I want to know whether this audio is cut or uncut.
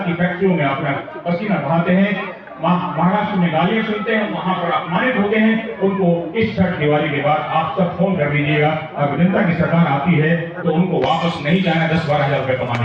uncut